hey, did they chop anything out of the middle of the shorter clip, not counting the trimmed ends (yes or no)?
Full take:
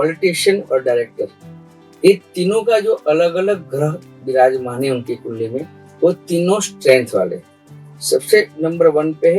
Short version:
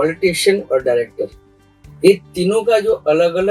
no